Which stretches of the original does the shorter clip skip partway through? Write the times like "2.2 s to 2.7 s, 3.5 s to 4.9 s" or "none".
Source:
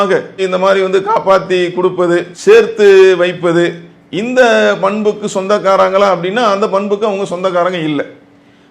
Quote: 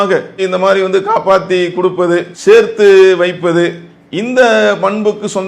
none